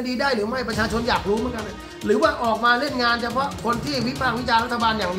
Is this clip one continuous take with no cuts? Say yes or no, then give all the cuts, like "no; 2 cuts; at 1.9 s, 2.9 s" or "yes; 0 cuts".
yes; 0 cuts